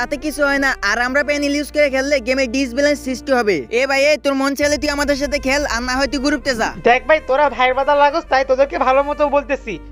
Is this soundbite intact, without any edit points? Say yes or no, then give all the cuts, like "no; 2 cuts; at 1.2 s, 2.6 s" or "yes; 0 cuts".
yes; 0 cuts